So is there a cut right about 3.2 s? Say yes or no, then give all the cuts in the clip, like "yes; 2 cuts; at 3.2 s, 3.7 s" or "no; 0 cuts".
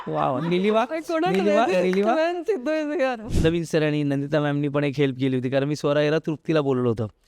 yes; 1 cut; at 3.2 s